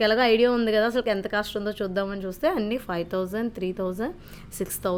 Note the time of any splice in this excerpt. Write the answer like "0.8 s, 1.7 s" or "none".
none